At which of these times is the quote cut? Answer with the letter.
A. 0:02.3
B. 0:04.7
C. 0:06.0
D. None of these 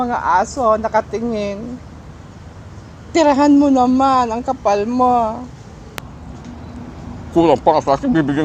C